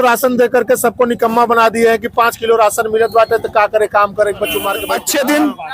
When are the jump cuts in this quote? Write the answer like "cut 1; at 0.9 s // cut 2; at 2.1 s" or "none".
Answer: cut 1; at 4.8 s